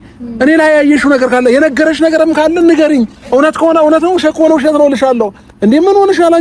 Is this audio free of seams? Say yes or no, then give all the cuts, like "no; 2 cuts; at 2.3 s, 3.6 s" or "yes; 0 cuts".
yes; 0 cuts